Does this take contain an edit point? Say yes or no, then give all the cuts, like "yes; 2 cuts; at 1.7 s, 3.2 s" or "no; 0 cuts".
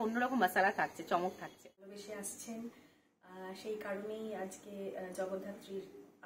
yes; 1 cut; at 2.0 s